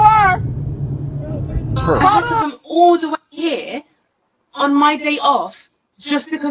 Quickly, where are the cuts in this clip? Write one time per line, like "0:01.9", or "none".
0:02.4